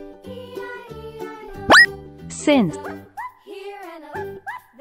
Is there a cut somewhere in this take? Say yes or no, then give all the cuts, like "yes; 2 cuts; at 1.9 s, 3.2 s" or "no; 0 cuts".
yes; 1 cut; at 1.0 s